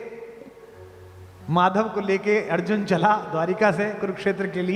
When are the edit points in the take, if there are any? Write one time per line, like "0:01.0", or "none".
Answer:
none